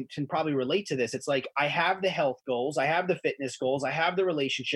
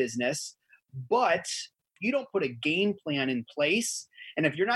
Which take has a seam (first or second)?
second